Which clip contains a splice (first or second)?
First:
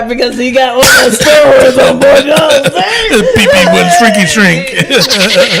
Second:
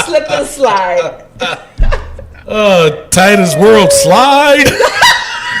second